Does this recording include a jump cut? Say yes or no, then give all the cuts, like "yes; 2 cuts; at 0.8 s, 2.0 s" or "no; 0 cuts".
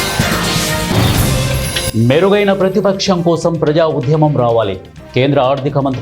yes; 1 cut; at 1.5 s